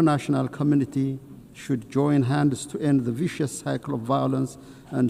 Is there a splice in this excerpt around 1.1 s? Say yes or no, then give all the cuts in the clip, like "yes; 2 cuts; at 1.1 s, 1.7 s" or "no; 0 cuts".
no; 0 cuts